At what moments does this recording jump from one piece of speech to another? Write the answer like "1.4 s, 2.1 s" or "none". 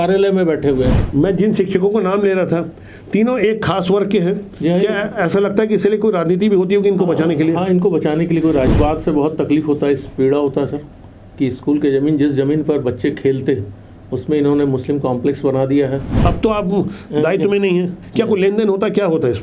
1.1 s, 8.7 s, 16.1 s